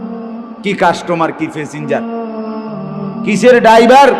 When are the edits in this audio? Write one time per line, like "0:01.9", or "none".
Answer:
none